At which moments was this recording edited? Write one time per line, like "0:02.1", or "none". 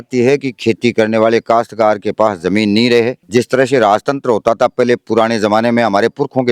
none